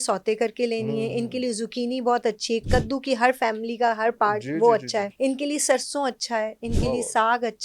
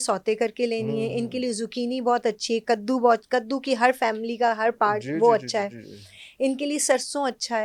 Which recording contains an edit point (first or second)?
first